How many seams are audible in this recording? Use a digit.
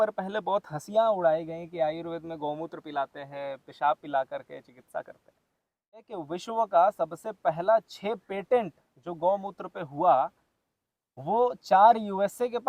1